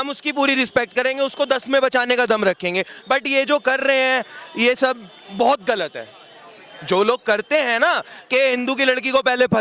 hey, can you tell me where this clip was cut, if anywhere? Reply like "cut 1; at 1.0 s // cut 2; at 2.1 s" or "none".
none

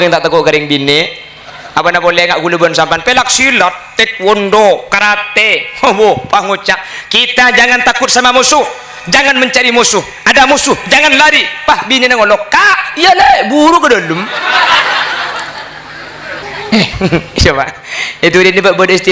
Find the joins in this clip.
cut 1; at 16.4 s

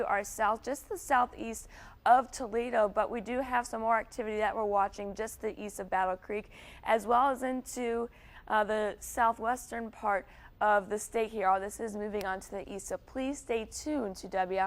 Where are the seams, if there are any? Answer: none

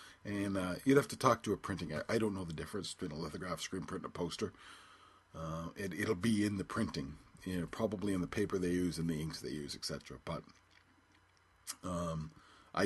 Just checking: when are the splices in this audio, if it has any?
none

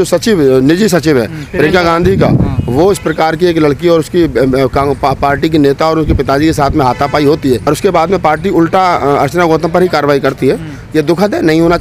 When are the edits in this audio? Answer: none

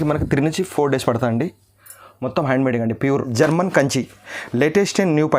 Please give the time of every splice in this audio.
cut 1; at 3.3 s

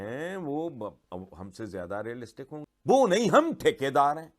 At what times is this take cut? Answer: cut 1; at 2.6 s

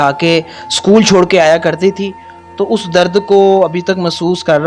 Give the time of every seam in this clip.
none

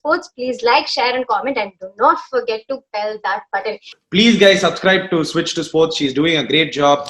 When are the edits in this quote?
cut 1; at 3.9 s

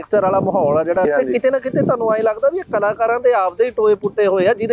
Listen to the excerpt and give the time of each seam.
cut 1; at 1.1 s

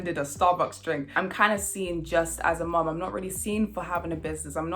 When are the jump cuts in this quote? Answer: cut 1; at 1.1 s

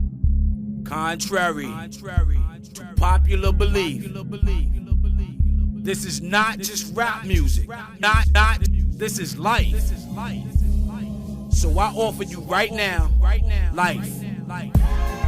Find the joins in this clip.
cut 1; at 1.1 s

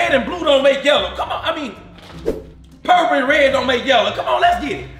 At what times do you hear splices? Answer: none

